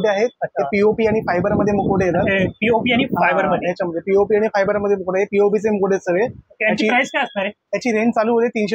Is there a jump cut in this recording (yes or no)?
no